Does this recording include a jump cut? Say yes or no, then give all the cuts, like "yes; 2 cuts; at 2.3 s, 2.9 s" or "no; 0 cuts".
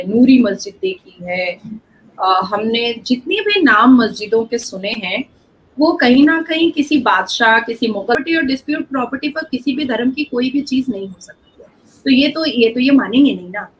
yes; 1 cut; at 8.1 s